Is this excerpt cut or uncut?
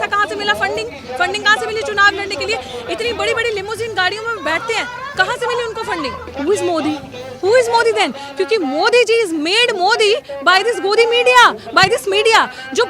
cut